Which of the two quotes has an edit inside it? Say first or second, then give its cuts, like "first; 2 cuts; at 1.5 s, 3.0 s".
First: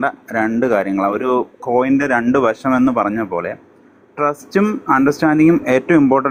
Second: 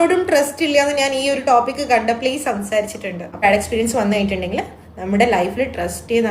second; 1 cut; at 3.4 s